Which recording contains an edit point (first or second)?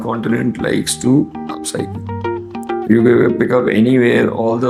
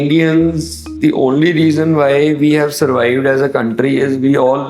second